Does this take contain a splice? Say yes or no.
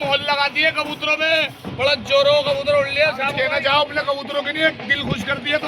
yes